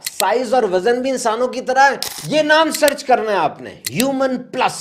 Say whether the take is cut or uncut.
cut